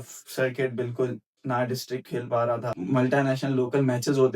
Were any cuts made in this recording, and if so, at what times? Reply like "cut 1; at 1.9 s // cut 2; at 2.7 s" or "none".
cut 1; at 2.8 s